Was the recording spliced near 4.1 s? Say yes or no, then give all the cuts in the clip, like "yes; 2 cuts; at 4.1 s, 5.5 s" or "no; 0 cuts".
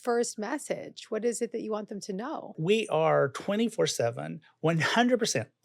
no; 1 cut; at 2.6 s